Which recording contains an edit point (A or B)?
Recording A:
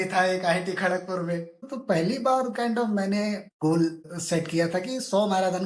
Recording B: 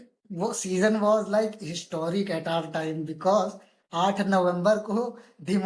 A